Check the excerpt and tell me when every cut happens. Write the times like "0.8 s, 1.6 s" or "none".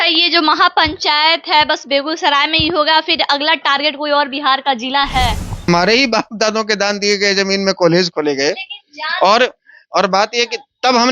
5.7 s